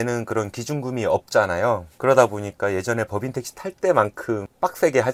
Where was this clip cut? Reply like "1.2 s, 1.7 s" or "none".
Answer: none